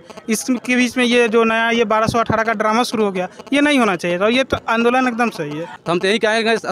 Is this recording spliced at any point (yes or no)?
yes